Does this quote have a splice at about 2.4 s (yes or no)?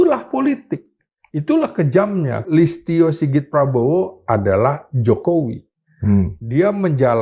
yes